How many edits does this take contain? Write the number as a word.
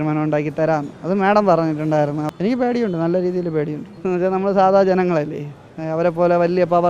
three